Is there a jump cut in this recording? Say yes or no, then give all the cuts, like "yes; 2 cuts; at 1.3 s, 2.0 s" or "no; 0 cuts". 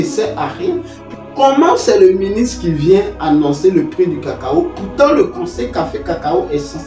yes; 1 cut; at 1.0 s